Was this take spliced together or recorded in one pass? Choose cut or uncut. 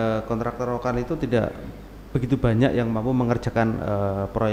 uncut